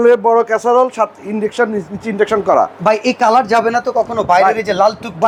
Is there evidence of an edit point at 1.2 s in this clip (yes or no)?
no